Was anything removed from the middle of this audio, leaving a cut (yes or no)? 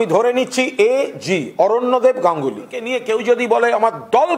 yes